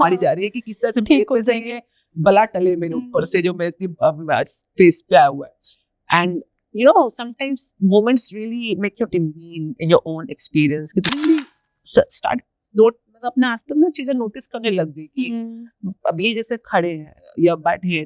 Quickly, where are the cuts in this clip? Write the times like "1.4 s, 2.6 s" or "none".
11.1 s